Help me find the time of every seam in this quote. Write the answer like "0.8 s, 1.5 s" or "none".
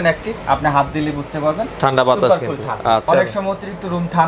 3.0 s